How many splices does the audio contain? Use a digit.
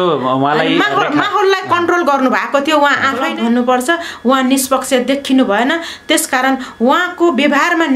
1